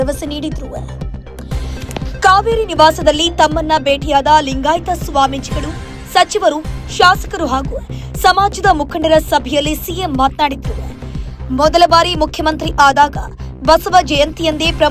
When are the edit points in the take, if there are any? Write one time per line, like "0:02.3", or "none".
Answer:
0:00.8
0:02.2